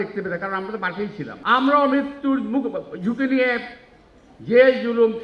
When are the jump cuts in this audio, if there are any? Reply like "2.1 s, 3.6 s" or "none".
1.3 s